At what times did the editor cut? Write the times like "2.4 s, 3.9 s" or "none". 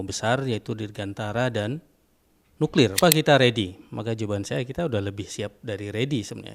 3.0 s

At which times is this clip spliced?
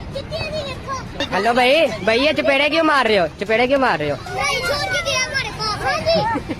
1.2 s

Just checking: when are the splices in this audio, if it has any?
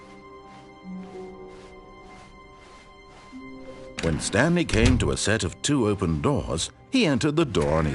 4.0 s, 6.5 s

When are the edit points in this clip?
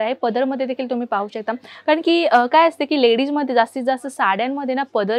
none

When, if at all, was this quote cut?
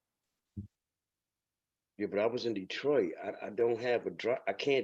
none

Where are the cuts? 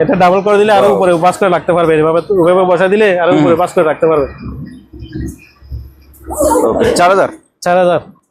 none

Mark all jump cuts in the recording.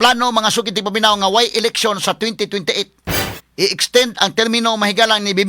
3.3 s

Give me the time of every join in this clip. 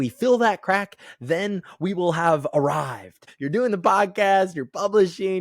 3.3 s

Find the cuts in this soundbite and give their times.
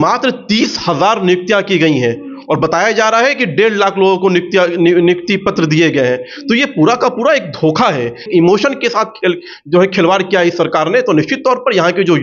8.3 s

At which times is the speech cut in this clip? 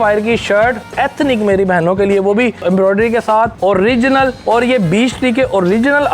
0.9 s, 2.6 s, 3.5 s, 4.4 s

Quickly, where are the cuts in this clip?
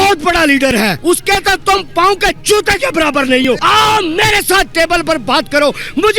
1.0 s, 3.6 s

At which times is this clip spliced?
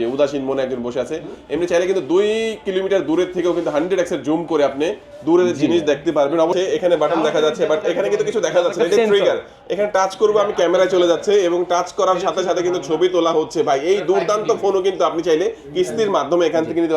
6.5 s

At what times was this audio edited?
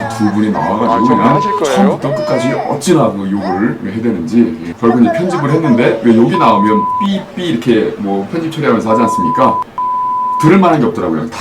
none

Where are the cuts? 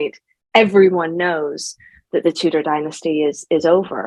none

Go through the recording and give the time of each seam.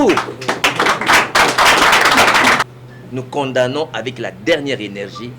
2.6 s

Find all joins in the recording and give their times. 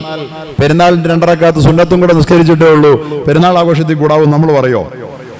2.3 s

